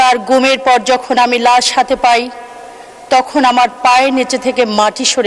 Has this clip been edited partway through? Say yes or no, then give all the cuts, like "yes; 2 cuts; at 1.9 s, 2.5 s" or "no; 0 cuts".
no; 0 cuts